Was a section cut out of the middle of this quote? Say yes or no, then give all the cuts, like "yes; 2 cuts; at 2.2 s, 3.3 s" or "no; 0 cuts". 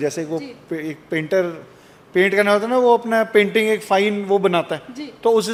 no; 0 cuts